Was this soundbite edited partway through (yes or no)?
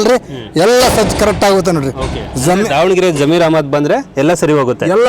no